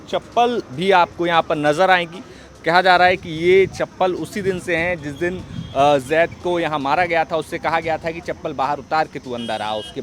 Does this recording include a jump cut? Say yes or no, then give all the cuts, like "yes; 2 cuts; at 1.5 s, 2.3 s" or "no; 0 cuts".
no; 0 cuts